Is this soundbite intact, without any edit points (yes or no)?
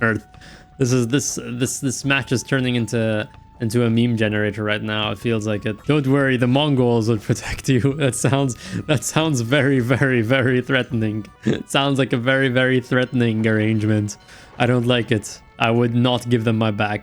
no